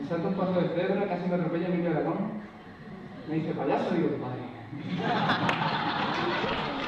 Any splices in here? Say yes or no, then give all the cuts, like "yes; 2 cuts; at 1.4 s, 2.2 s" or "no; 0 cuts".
yes; 1 cut; at 5.4 s